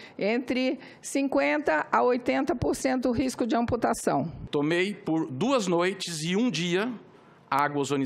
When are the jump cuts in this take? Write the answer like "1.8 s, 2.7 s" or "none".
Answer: 4.4 s